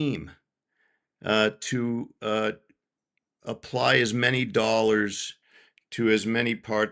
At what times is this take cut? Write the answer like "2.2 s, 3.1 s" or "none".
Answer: none